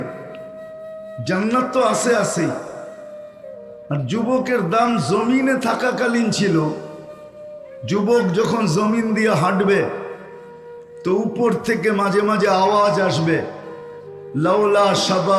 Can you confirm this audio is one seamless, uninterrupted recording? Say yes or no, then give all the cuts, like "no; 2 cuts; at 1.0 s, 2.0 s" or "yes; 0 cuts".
yes; 0 cuts